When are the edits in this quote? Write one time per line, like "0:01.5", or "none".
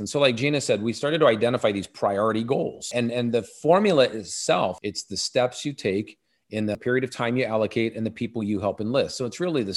0:02.8
0:04.8
0:06.8